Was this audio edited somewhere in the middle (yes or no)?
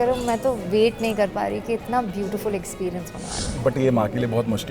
yes